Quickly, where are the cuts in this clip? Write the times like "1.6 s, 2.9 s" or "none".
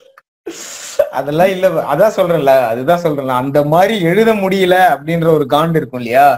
none